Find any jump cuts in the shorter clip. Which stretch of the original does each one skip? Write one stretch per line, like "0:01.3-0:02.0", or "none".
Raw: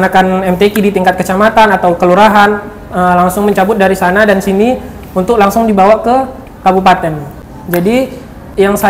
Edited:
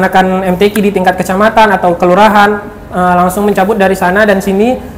none